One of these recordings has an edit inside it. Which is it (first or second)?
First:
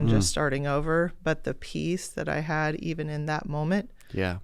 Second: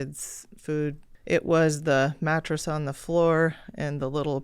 second